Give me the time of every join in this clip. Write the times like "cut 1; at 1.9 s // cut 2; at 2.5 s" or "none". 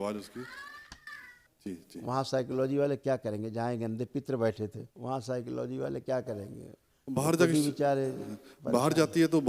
cut 1; at 1.4 s // cut 2; at 4.9 s